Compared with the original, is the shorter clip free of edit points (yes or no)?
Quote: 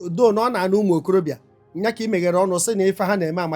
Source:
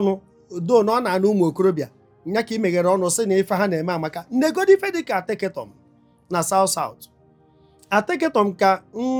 yes